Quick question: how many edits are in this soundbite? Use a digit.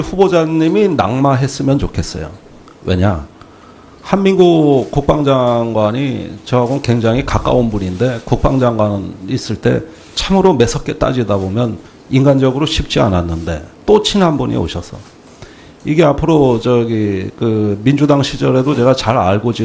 0